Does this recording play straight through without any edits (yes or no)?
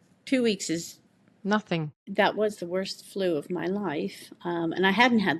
no